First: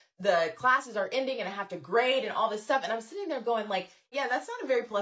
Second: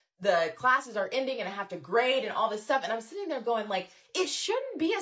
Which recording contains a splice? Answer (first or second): first